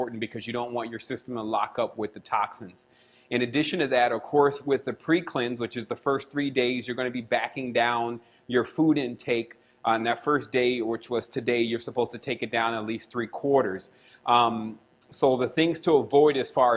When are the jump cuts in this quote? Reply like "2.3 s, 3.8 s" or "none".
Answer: 10.0 s